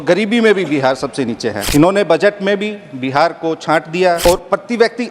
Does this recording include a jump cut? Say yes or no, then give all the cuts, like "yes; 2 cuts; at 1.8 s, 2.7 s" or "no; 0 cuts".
yes; 2 cuts; at 1.6 s, 4.2 s